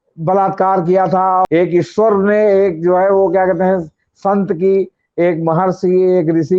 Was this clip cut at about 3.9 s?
no; 1 cut; at 1.5 s

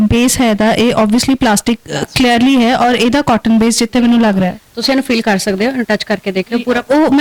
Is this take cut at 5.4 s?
no; 0 cuts

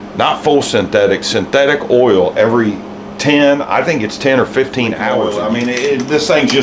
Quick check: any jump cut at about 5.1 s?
yes; 1 cut; at 5.1 s

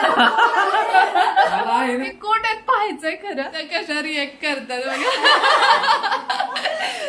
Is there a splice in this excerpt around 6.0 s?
no; 2 cuts; at 2.1 s, 3.6 s

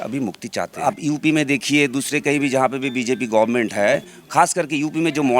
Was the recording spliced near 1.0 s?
yes; 1 cut; at 1.0 s

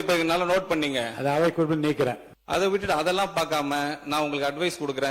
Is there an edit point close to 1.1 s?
no; 1 cut; at 2.3 s

